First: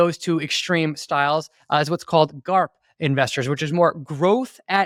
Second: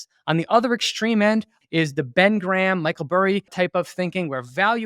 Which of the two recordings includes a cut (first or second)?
second